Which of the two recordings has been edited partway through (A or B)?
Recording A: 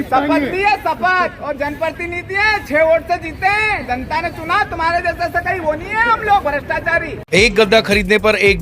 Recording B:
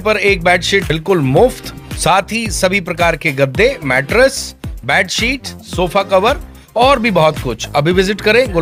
A